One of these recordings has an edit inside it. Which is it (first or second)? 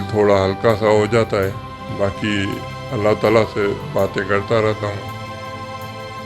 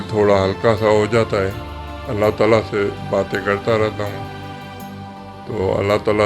second